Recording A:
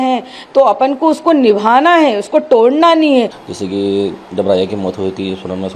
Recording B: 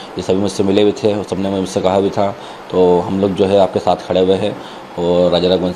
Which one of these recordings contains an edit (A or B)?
A